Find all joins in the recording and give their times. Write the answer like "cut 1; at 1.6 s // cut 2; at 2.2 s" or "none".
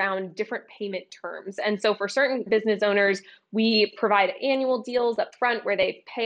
none

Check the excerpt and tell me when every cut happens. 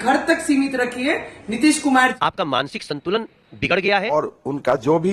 cut 1; at 2.1 s // cut 2; at 4.1 s

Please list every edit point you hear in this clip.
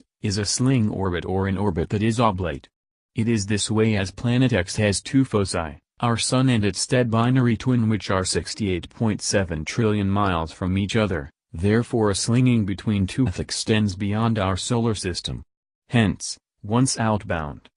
none

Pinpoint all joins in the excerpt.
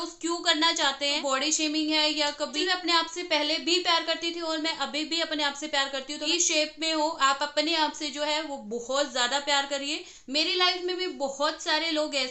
cut 1; at 1.2 s // cut 2; at 2.5 s // cut 3; at 6.2 s // cut 4; at 10.1 s

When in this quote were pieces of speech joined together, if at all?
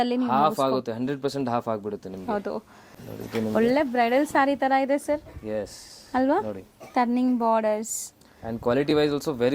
cut 1; at 3.0 s

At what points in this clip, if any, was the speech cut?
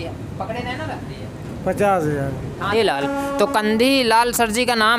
cut 1; at 1.0 s // cut 2; at 2.7 s

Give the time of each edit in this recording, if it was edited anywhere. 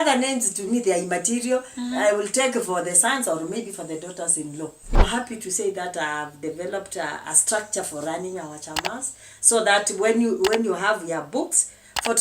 cut 1; at 5.0 s

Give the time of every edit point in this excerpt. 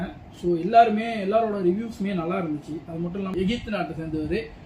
cut 1; at 3.3 s

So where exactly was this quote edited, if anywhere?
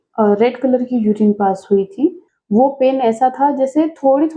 cut 1; at 2.3 s

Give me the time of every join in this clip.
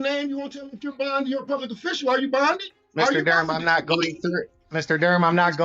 cut 1; at 2.8 s // cut 2; at 4.6 s

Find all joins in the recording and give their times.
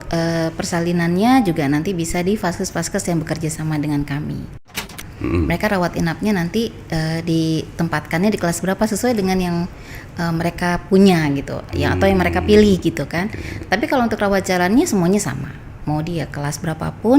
cut 1; at 4.8 s

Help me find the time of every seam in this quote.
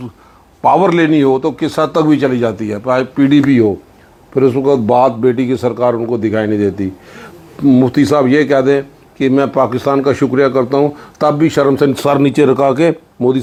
none

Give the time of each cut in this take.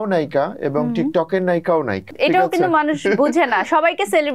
cut 1; at 2.0 s

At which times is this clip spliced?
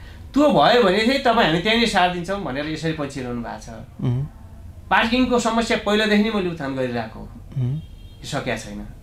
none

